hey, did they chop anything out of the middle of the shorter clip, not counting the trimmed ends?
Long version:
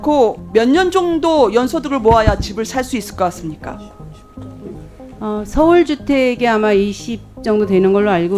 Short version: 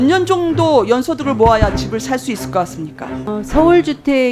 yes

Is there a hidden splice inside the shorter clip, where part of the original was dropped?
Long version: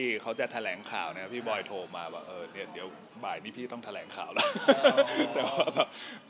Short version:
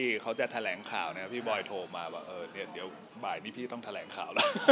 no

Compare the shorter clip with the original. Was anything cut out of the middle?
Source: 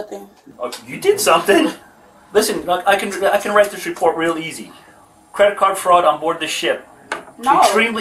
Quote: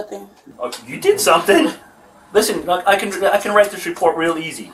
no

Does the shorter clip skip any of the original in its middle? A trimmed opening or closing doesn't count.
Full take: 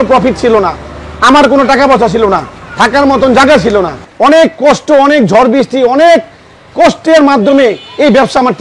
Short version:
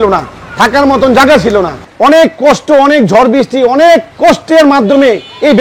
yes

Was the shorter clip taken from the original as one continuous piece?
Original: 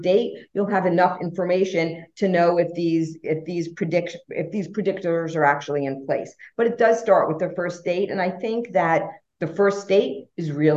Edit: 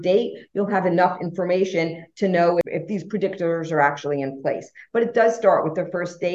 no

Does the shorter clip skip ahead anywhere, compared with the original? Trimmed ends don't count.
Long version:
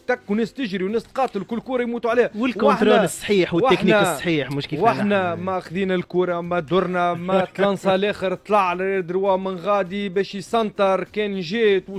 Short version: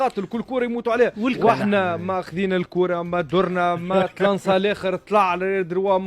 yes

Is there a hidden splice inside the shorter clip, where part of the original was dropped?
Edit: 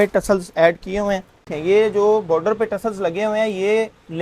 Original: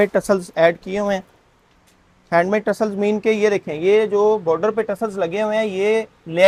yes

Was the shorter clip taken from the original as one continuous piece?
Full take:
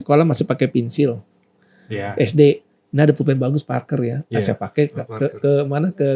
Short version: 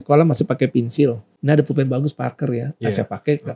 no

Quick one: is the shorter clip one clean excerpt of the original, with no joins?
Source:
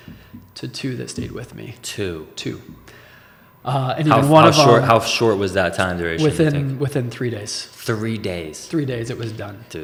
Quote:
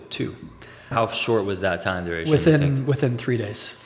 no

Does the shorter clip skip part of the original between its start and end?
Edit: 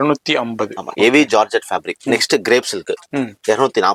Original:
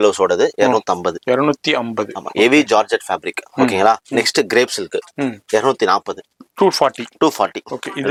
yes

